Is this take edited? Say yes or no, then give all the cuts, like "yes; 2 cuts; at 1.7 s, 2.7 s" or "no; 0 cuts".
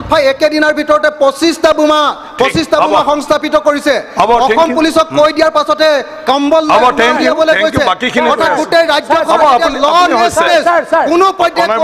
no; 0 cuts